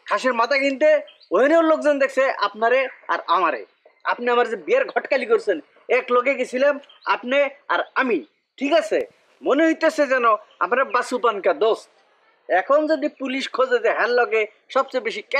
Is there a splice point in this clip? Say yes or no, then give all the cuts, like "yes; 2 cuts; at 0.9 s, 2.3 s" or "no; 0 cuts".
no; 0 cuts